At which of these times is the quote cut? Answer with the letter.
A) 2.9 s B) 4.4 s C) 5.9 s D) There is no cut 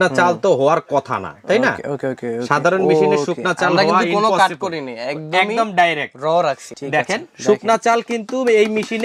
D